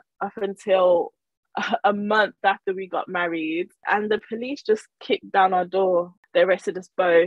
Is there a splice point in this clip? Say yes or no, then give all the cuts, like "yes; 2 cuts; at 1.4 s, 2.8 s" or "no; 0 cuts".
yes; 2 cuts; at 3.8 s, 6.2 s